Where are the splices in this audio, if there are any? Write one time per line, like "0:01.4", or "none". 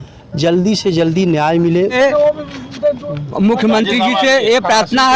0:01.9

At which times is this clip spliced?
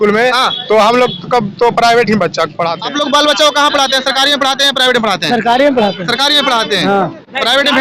0:02.8

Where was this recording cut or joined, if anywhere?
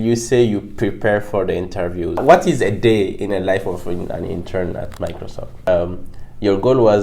0:02.2
0:05.7

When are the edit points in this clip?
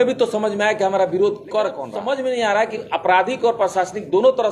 0:01.9

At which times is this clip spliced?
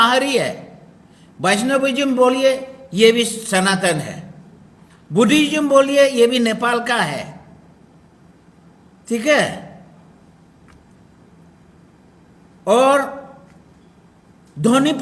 none

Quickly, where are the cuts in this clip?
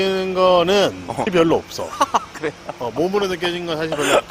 0:01.3

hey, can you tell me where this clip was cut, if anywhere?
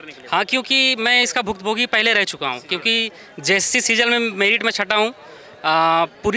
none

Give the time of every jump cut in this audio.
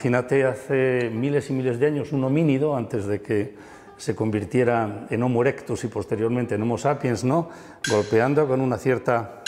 none

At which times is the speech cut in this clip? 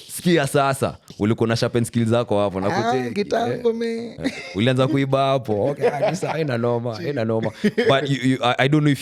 none

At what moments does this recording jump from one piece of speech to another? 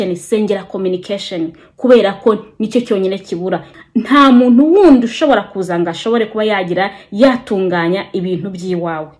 0:03.7

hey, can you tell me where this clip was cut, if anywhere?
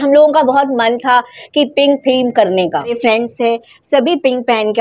0:03.0

